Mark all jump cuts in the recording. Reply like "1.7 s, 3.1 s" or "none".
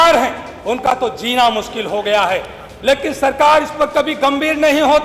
none